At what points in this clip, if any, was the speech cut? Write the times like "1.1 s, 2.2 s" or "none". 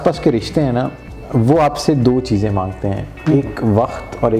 none